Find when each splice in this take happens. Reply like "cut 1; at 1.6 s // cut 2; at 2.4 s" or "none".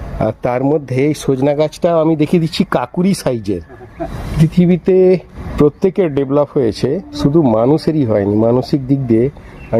cut 1; at 4.2 s // cut 2; at 5.4 s // cut 3; at 7.1 s